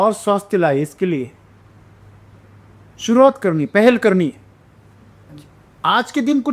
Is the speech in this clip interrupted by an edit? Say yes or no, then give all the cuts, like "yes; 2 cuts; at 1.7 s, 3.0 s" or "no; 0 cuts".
no; 0 cuts